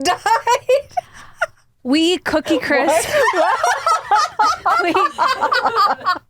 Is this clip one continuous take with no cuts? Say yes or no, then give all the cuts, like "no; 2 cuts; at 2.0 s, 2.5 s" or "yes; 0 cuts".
yes; 0 cuts